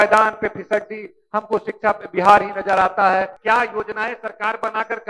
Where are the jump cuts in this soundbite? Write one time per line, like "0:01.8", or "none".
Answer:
0:03.4